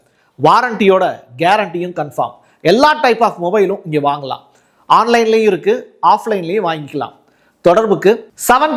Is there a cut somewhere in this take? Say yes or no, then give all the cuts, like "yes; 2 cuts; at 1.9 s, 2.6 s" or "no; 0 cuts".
no; 0 cuts